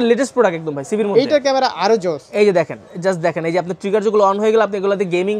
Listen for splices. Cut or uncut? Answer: cut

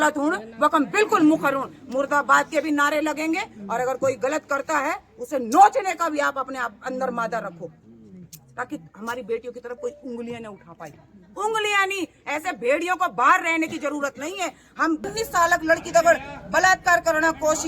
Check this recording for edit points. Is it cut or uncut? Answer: cut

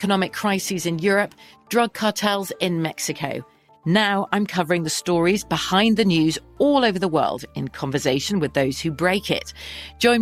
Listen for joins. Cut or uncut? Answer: uncut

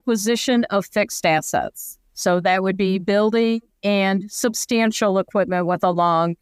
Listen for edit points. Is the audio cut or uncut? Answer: uncut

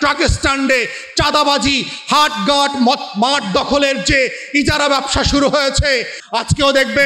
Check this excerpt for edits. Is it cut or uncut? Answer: cut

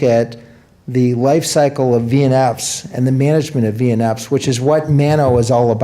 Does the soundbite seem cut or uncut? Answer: cut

